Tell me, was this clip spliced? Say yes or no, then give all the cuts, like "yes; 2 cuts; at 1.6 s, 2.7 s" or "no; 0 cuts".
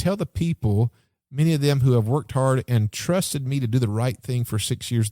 no; 0 cuts